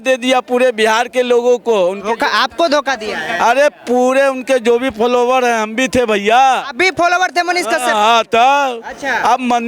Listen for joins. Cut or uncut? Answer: uncut